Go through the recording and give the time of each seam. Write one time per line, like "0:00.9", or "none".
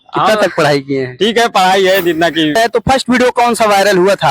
0:02.6